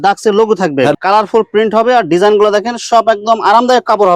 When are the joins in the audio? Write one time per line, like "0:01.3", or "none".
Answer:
0:00.9